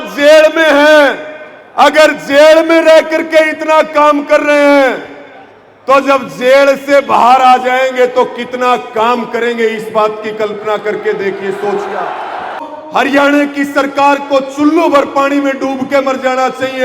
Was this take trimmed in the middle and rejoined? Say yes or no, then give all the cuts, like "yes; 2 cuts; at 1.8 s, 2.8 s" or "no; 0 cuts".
yes; 1 cut; at 12.7 s